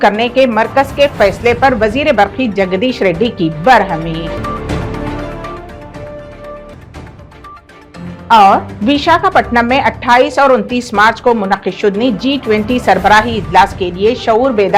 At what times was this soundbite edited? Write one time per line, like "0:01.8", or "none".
none